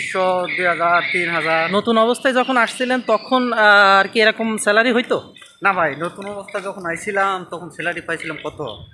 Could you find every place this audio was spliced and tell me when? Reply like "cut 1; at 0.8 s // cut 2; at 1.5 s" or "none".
cut 1; at 1.7 s